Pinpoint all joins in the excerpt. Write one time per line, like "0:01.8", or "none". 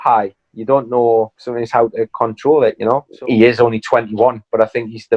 0:03.1